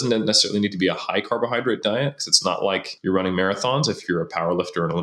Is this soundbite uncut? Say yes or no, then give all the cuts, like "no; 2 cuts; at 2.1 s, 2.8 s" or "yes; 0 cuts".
no; 1 cut; at 2.9 s